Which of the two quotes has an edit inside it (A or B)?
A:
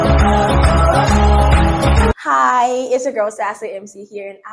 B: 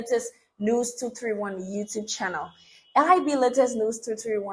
A